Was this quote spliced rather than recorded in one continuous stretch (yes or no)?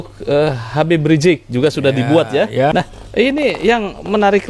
yes